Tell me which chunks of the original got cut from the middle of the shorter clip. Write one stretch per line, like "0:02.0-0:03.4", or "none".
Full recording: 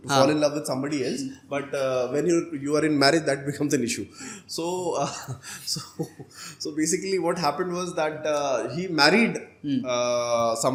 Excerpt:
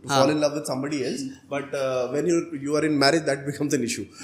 none